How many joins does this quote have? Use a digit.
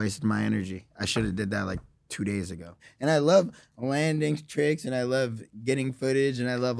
1